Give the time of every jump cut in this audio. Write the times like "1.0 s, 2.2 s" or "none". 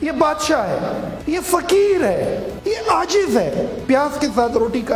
1.1 s, 3.8 s